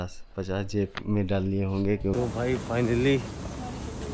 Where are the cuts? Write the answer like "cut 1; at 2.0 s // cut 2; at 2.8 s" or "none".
cut 1; at 2.1 s